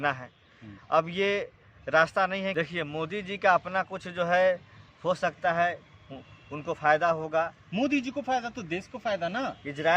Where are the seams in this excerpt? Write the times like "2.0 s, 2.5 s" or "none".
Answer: 2.5 s